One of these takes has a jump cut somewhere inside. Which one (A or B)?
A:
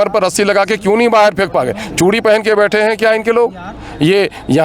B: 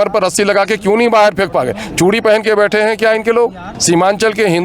B